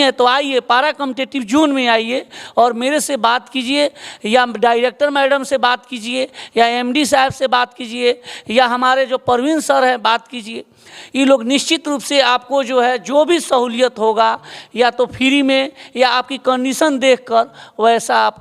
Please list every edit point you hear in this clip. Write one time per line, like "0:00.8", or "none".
none